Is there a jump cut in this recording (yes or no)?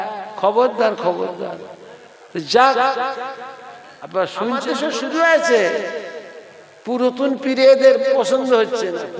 yes